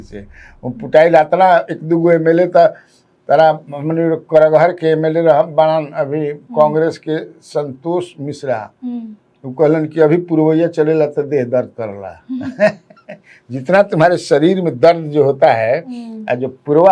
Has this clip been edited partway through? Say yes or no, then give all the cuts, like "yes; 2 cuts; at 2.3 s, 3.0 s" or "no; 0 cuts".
no; 0 cuts